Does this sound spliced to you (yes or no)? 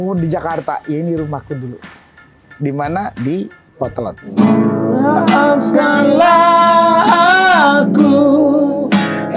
yes